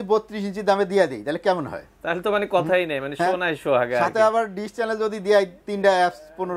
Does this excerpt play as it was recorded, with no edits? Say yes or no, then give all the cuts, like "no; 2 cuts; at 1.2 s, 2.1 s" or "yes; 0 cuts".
yes; 0 cuts